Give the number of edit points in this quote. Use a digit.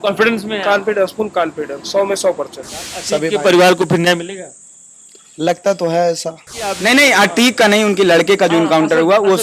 2